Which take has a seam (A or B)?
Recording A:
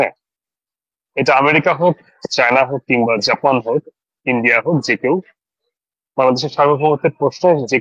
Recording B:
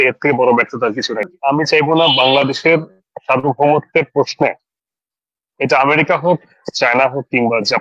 B